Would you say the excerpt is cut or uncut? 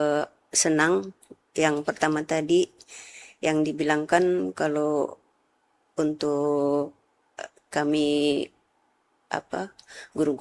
uncut